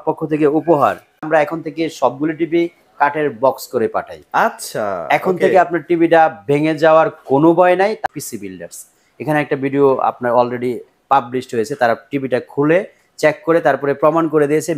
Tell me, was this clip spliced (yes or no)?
yes